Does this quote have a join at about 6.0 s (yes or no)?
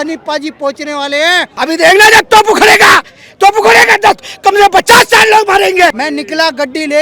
yes